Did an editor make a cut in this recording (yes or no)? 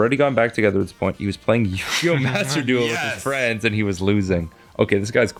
no